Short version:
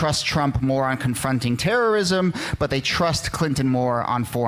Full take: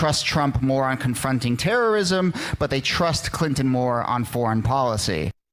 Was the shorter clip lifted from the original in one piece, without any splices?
yes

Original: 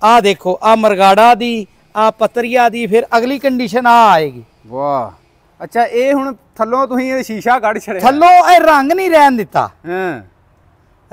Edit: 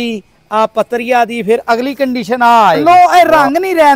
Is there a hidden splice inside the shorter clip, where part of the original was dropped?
yes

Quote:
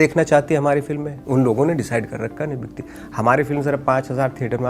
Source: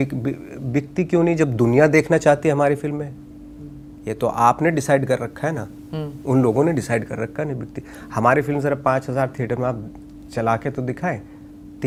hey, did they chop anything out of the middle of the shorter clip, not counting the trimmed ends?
yes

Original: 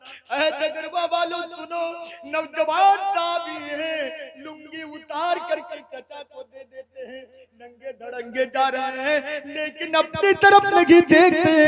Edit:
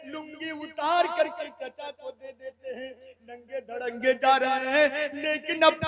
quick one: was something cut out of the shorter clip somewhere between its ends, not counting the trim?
no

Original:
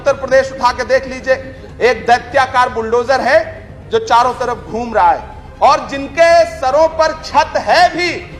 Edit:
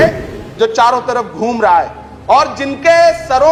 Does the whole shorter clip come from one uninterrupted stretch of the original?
yes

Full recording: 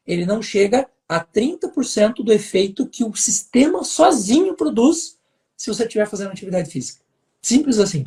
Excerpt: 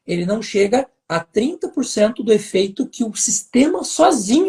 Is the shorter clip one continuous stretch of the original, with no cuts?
yes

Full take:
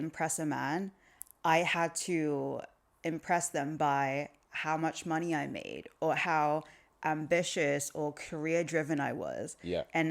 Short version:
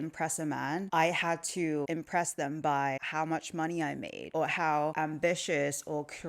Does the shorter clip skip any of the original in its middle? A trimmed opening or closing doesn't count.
yes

